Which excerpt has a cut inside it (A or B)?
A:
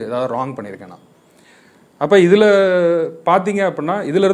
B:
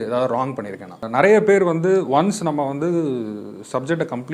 B